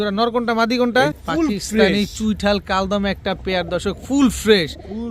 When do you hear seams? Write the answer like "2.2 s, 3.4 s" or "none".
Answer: 1.1 s